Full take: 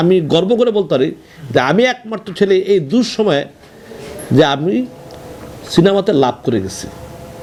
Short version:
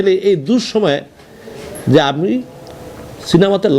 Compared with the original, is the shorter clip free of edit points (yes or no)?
yes